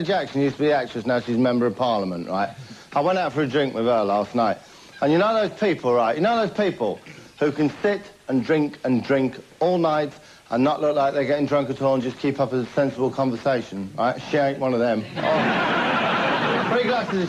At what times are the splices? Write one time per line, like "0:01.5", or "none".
0:03.7